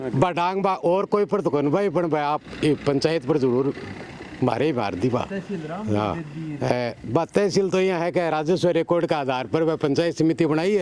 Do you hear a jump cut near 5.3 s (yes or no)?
no